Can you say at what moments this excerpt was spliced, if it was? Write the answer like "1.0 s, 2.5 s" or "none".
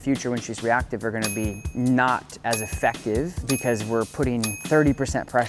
1.6 s, 3.5 s, 4.6 s